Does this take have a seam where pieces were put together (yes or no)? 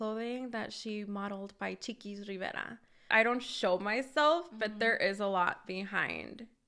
yes